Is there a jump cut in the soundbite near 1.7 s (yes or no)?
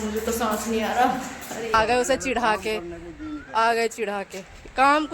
yes